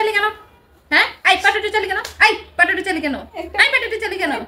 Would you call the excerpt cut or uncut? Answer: uncut